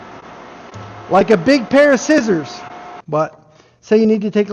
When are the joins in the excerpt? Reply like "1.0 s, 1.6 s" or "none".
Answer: 2.9 s